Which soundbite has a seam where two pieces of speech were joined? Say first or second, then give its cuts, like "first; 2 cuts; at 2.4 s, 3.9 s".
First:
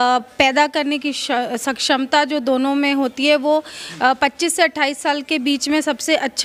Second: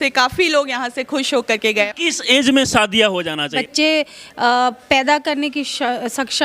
second; 2 cuts; at 1.9 s, 3.6 s